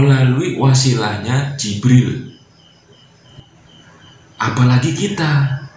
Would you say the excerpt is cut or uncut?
cut